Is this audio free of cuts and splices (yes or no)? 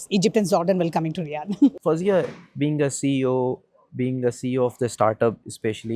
no